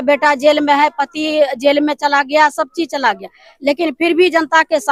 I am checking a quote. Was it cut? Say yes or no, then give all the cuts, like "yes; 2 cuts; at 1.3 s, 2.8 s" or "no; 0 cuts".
no; 0 cuts